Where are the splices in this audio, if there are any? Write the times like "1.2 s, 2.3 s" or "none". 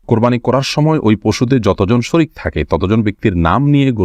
none